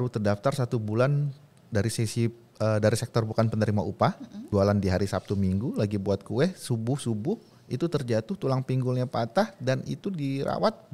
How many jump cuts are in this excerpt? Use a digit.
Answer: 1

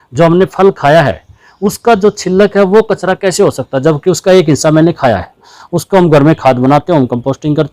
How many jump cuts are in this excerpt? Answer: 1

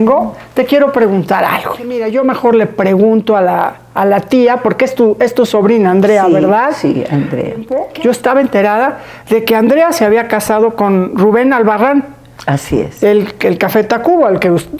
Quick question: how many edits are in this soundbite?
2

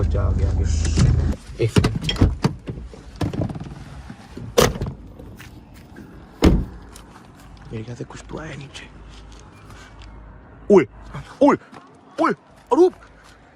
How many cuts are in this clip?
0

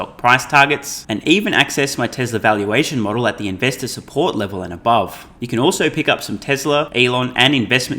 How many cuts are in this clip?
2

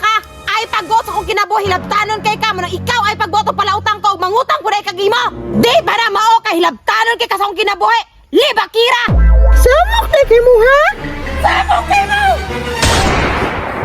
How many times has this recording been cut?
0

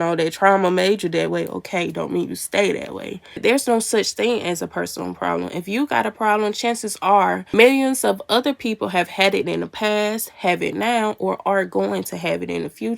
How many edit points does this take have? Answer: 2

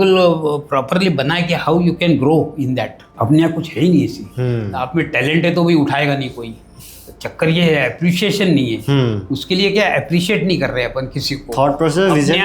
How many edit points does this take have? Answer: 1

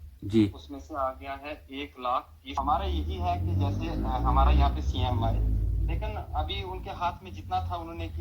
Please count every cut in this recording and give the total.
1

